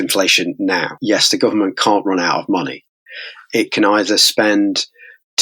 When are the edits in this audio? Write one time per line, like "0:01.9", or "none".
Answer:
0:00.9